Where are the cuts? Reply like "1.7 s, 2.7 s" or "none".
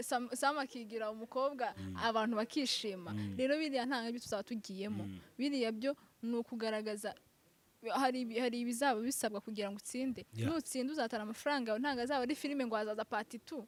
none